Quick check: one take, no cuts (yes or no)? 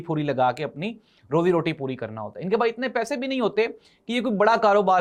yes